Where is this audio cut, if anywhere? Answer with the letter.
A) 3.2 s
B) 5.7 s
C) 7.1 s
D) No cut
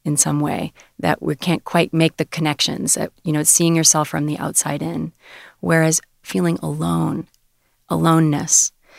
A